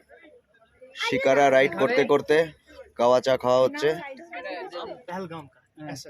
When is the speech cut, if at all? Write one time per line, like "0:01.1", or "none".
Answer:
0:05.0

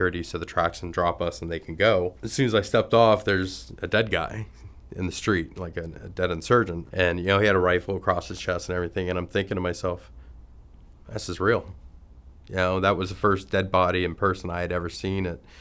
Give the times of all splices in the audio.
0:02.2
0:06.8

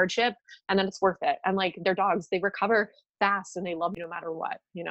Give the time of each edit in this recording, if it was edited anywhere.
0:04.0

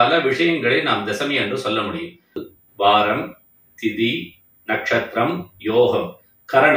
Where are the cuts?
0:02.5

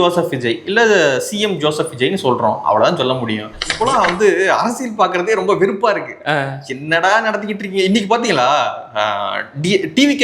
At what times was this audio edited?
0:03.6

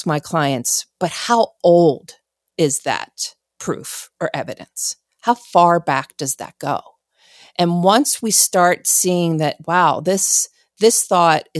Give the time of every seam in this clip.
none

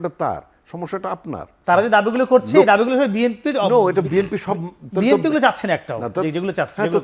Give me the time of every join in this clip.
0:01.5

